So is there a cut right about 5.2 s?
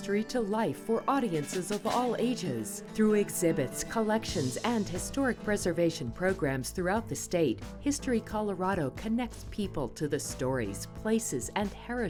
no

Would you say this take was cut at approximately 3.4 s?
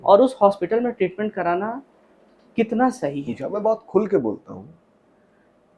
yes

